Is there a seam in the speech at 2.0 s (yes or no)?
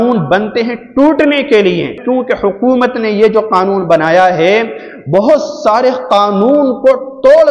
yes